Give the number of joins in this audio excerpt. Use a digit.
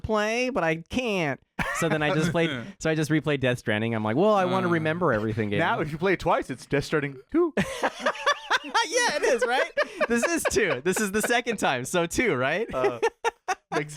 0